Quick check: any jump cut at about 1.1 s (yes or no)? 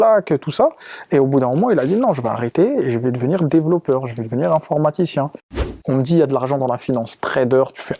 no